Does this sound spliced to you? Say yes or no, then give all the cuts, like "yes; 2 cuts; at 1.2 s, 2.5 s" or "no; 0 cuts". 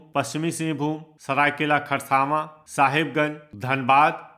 no; 0 cuts